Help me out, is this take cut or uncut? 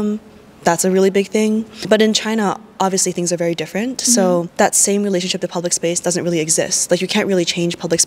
cut